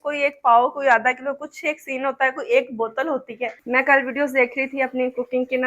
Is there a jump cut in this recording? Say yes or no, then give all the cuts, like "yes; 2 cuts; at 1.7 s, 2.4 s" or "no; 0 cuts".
yes; 1 cut; at 3.6 s